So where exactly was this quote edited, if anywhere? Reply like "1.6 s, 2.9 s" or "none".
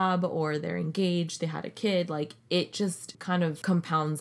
3.3 s